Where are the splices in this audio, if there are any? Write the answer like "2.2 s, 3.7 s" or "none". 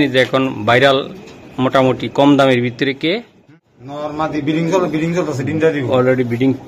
3.6 s